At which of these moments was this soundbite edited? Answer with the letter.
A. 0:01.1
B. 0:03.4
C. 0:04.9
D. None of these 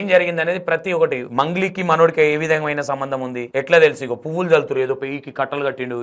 B